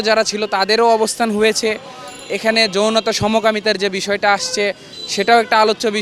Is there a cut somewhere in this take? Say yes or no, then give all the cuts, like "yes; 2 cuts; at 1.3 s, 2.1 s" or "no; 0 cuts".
no; 0 cuts